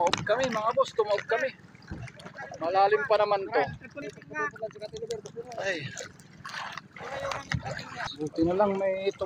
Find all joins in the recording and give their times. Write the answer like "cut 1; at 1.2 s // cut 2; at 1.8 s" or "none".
cut 1; at 4.0 s // cut 2; at 8.1 s